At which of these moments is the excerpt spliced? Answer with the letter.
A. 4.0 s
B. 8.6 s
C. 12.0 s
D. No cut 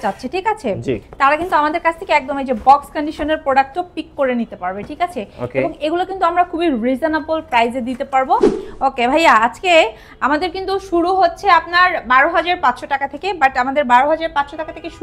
B